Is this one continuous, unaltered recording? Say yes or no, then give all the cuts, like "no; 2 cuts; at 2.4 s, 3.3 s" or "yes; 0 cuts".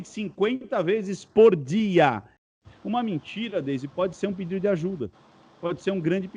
no; 1 cut; at 2.5 s